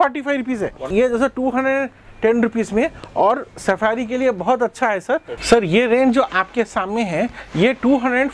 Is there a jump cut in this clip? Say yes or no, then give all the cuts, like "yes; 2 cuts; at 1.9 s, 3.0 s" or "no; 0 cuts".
yes; 2 cuts; at 0.9 s, 5.3 s